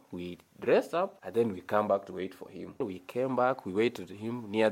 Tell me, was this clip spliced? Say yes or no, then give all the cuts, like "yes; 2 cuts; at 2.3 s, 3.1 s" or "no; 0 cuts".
yes; 2 cuts; at 1.2 s, 2.9 s